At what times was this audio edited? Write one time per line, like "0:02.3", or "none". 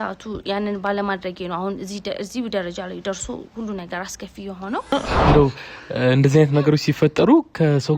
0:04.9